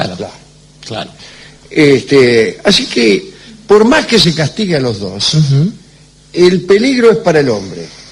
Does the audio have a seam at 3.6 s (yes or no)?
no